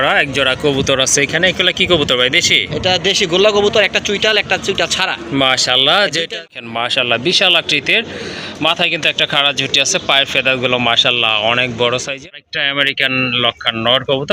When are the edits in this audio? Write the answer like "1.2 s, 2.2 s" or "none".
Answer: 6.4 s, 12.2 s